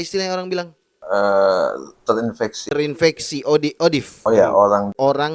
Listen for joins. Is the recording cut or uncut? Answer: uncut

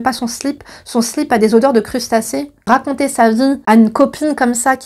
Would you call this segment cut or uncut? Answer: cut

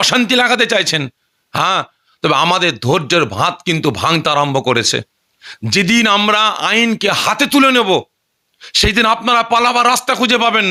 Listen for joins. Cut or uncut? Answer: uncut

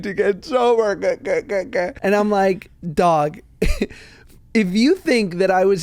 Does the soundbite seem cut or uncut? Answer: cut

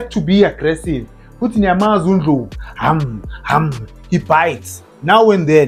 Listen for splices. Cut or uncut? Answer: uncut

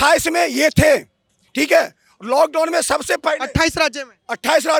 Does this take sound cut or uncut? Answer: uncut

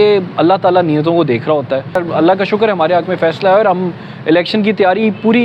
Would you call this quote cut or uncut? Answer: cut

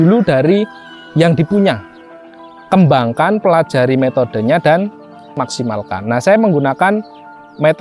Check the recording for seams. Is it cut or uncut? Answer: cut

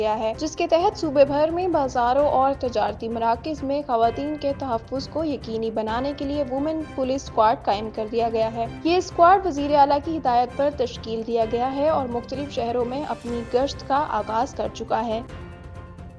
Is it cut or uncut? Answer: cut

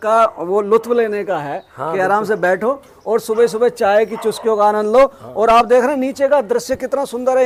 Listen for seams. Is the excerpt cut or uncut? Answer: uncut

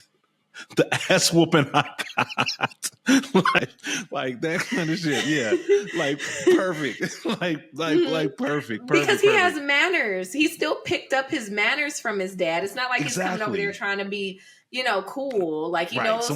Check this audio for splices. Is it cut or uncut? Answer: cut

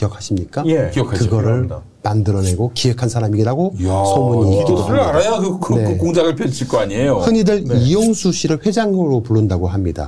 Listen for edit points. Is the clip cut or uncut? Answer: uncut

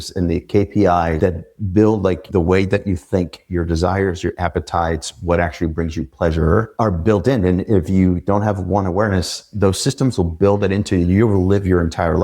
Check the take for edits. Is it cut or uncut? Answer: cut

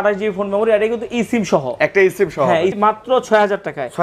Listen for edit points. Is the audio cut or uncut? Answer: cut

